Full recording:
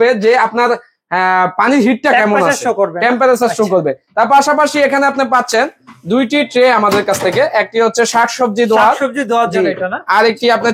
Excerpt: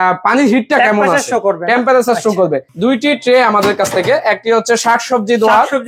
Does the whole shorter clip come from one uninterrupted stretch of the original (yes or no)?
no